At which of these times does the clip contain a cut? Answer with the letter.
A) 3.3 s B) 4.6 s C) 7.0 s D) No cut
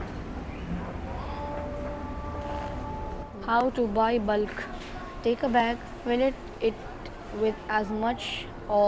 A